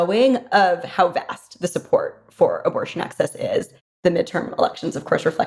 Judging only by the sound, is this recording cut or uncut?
cut